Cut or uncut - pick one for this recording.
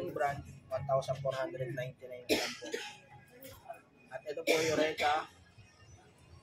uncut